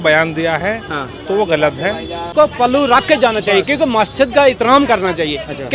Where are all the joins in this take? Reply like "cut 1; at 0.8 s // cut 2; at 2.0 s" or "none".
cut 1; at 2.3 s